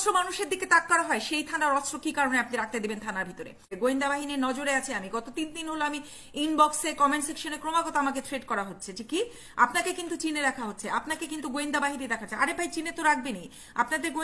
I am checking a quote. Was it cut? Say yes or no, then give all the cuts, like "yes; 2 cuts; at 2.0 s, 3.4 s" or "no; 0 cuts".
yes; 1 cut; at 3.7 s